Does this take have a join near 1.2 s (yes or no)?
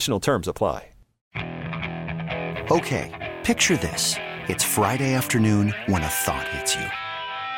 yes